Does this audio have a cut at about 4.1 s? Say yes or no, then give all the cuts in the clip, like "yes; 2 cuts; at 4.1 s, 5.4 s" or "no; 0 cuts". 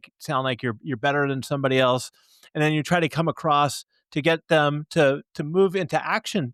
no; 0 cuts